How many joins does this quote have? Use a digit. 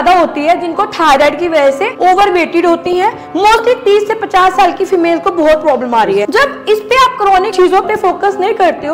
2